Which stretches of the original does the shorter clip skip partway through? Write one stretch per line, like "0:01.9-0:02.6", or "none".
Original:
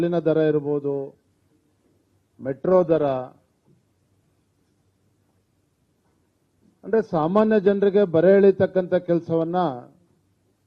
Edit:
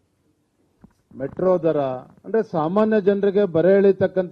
0:03.4-0:06.7